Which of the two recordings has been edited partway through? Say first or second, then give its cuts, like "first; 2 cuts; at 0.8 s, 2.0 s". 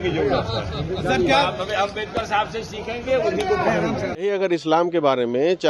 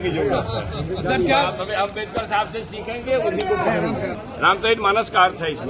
first; 1 cut; at 4.3 s